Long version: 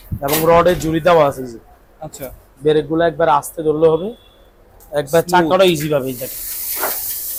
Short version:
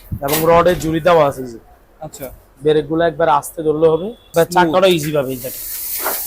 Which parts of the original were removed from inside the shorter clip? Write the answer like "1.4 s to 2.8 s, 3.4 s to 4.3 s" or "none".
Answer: 4.2 s to 5.0 s